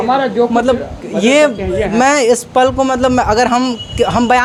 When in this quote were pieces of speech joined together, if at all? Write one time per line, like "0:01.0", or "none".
none

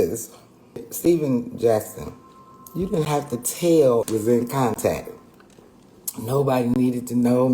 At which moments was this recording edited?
0:00.9
0:04.1

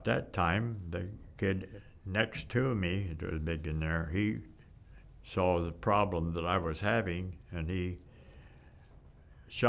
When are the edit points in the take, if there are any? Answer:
0:01.3

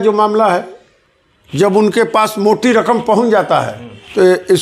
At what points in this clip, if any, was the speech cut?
none

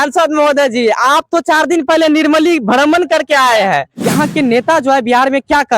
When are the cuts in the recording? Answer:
0:03.9

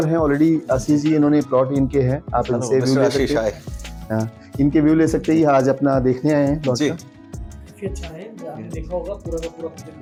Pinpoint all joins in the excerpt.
none

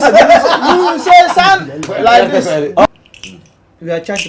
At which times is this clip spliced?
0:02.6

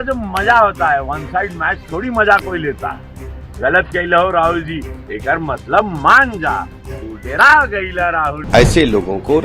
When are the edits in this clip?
0:08.4

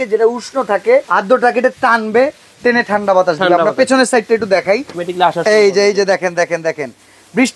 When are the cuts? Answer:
0:01.1
0:04.9

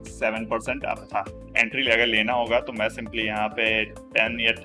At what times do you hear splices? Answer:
0:01.4

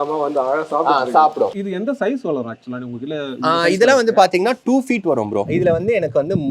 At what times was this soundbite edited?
0:01.6
0:05.5

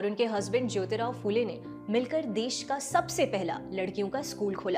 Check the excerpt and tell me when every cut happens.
none

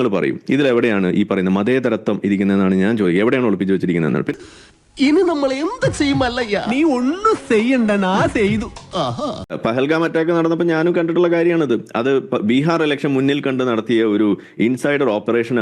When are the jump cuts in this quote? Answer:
0:09.4

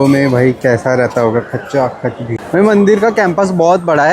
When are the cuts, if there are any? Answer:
0:02.4

